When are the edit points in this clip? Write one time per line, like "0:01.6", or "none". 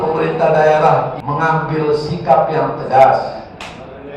0:01.2